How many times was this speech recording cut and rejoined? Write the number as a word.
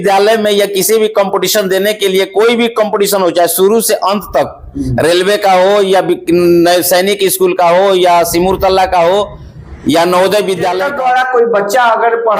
one